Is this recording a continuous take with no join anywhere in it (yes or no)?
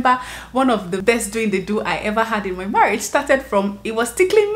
no